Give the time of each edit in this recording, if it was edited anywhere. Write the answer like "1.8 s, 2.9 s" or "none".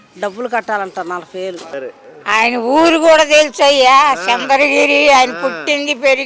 1.7 s